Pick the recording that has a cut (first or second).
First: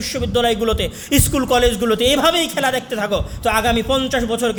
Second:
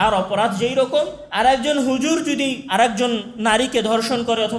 second